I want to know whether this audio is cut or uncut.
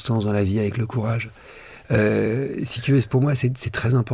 uncut